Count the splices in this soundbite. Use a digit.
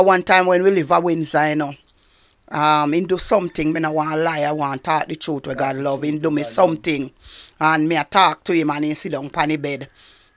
0